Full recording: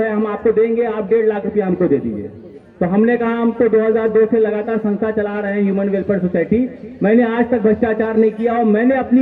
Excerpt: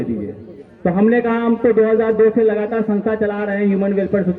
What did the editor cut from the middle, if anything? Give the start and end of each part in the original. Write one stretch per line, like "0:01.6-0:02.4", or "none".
none